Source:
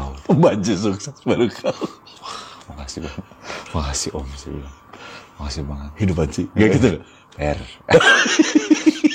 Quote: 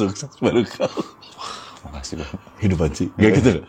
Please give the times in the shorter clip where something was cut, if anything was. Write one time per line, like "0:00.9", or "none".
0:02.5